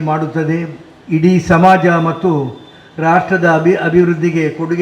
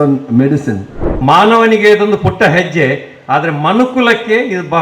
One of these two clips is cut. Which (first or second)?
second